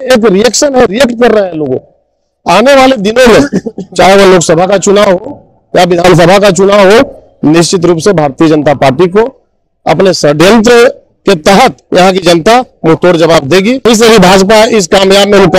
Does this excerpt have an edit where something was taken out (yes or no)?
yes